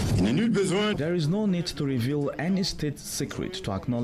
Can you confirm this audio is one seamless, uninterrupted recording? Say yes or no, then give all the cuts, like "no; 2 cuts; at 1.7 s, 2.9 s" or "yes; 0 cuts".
no; 1 cut; at 0.9 s